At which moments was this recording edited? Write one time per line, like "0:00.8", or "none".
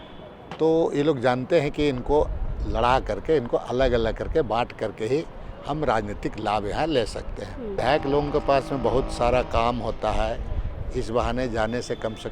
0:07.8